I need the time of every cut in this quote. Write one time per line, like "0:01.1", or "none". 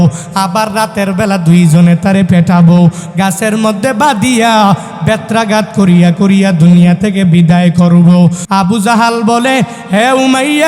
0:08.4